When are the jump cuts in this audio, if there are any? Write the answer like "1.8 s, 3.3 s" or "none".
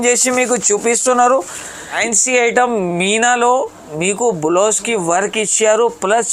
2.0 s